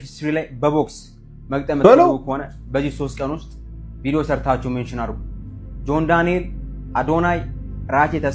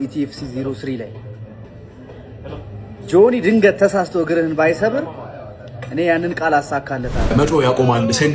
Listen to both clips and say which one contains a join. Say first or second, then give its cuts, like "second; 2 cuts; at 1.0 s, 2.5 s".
second; 1 cut; at 7.3 s